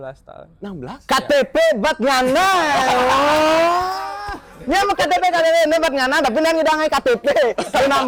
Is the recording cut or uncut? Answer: uncut